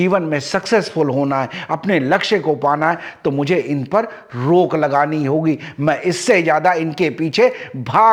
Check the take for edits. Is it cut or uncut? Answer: uncut